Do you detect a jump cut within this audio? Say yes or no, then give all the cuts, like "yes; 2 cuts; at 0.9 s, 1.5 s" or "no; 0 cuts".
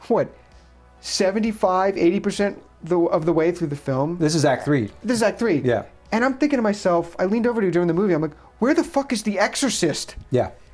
no; 0 cuts